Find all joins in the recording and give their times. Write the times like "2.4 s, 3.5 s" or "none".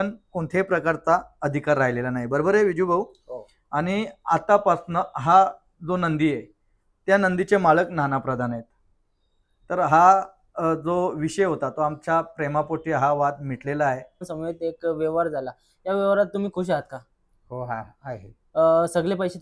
14.3 s

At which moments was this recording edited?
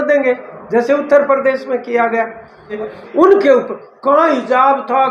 2.7 s

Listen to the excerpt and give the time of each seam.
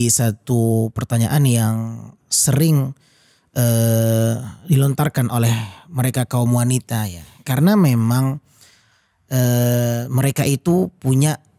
none

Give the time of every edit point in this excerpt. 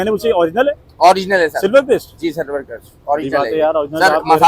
none

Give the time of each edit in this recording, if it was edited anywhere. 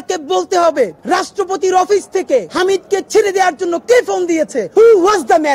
1.0 s, 2.5 s, 4.6 s

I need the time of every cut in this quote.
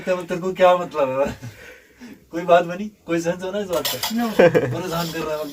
none

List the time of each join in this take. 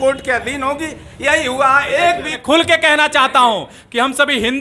2.4 s

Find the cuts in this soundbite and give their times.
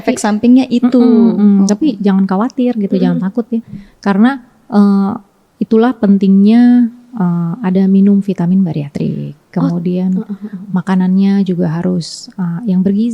none

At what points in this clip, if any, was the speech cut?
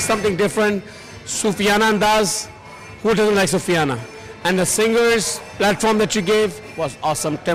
none

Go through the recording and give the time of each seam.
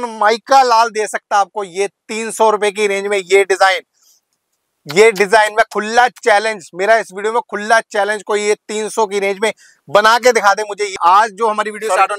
10.9 s

